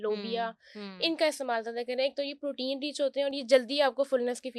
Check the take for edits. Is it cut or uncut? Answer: uncut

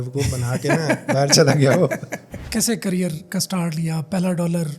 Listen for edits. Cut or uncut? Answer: cut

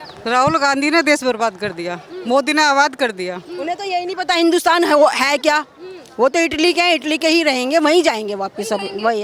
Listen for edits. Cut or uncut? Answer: uncut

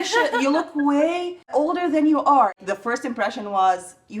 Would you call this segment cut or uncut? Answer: cut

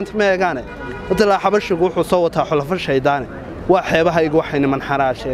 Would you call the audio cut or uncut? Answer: uncut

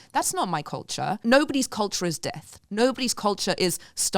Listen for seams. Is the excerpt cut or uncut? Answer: cut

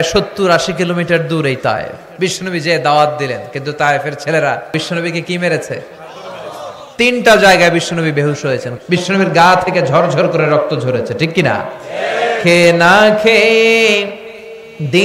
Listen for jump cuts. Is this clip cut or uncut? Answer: cut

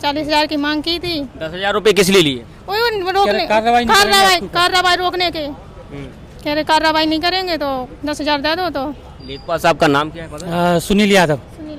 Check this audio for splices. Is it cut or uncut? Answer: uncut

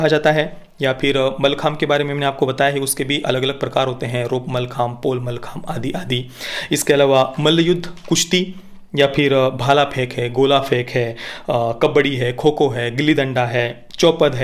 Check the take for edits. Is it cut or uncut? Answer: uncut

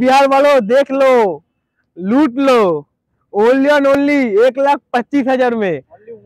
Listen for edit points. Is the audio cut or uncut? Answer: uncut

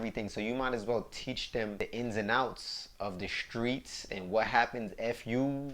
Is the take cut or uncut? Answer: cut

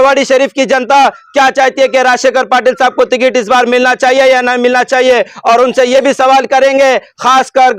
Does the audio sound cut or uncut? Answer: uncut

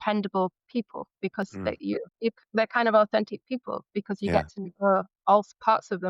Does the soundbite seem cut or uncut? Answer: uncut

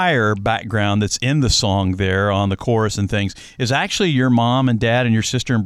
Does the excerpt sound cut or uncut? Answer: uncut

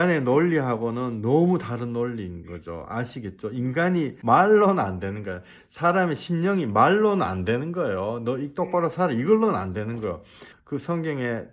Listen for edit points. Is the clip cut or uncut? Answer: cut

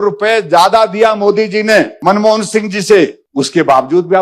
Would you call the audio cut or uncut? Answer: cut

